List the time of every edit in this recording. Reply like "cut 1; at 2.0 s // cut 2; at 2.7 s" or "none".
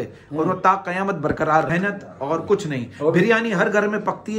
cut 1; at 1.7 s

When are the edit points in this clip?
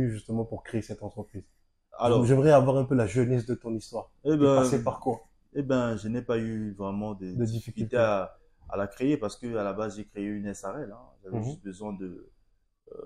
none

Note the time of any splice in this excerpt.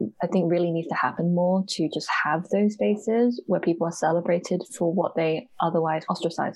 none

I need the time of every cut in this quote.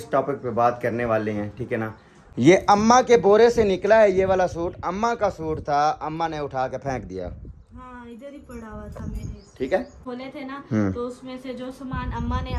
cut 1; at 2.2 s // cut 2; at 10.0 s

